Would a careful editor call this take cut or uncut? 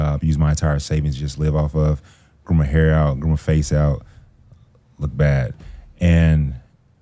uncut